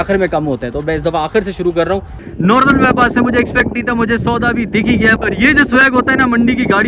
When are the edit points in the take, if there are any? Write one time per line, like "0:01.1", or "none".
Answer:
0:02.2
0:05.2